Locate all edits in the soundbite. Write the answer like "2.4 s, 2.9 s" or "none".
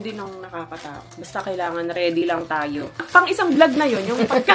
1.1 s, 3.1 s